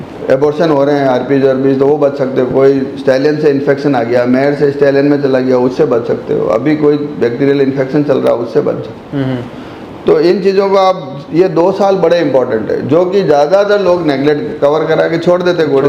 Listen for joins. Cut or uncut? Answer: uncut